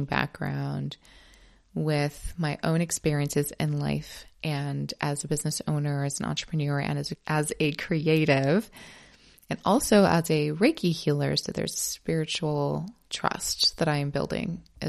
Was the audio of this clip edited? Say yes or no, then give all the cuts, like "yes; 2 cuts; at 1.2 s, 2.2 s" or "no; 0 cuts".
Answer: no; 0 cuts